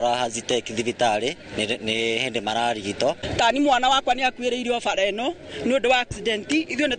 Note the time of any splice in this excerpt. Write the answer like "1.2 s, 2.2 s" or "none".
3.2 s